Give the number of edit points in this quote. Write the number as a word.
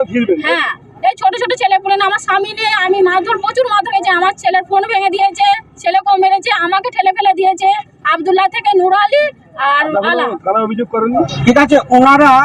one